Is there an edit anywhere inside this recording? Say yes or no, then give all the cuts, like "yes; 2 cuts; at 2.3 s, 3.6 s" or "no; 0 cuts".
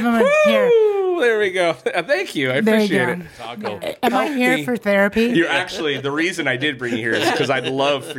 yes; 1 cut; at 3.6 s